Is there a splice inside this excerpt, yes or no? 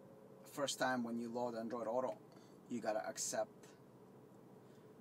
no